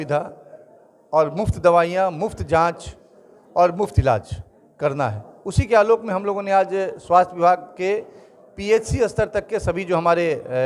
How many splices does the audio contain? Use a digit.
0